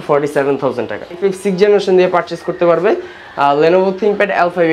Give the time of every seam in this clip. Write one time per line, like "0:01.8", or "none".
0:01.2